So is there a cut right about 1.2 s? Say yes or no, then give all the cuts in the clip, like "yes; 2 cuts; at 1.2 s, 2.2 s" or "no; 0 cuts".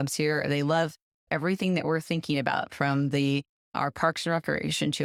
no; 0 cuts